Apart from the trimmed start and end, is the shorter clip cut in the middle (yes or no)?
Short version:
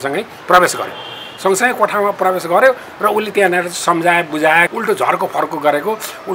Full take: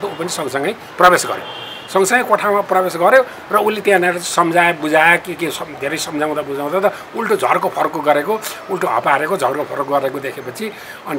yes